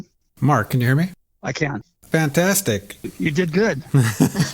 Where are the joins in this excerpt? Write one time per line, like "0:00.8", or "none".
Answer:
0:02.0

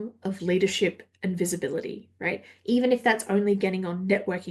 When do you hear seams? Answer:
none

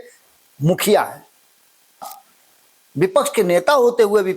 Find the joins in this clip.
0:02.2

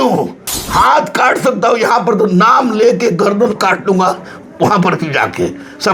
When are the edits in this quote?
none

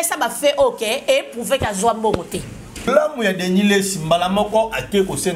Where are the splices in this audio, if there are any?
0:02.9

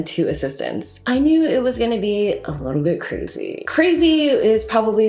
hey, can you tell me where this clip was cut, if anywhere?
0:01.0

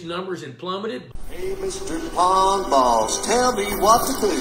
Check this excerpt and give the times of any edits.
0:01.1

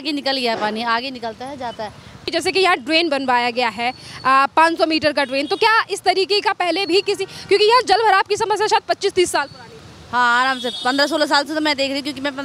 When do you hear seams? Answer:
none

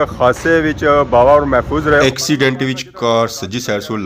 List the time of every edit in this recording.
0:02.0

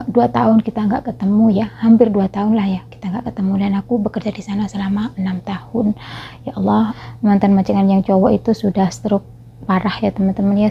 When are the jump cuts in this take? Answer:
0:06.9

